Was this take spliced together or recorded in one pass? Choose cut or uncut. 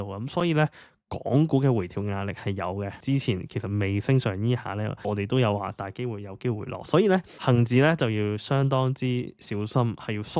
cut